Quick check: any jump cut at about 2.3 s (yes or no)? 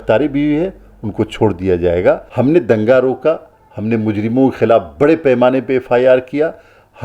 yes